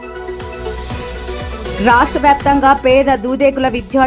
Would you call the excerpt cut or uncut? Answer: cut